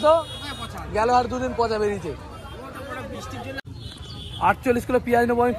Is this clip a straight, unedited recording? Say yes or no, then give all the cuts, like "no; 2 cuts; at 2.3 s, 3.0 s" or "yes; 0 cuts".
no; 1 cut; at 3.6 s